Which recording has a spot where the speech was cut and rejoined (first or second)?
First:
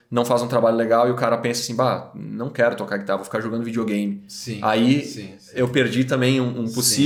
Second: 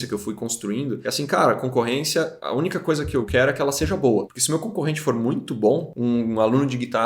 second